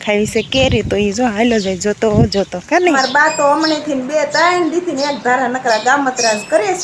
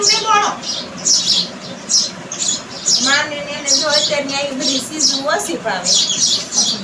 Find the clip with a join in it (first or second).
first